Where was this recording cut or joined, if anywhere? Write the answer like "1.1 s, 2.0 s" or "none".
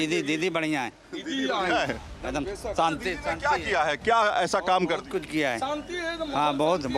none